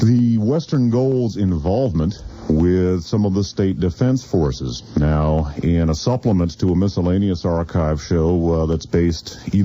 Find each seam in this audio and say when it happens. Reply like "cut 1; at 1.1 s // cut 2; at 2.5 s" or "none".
none